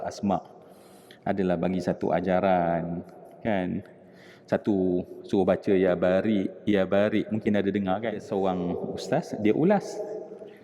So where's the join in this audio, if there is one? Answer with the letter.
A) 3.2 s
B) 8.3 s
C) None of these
B